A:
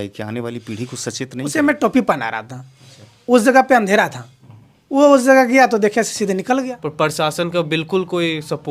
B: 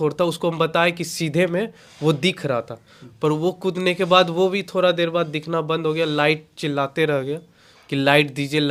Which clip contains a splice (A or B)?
A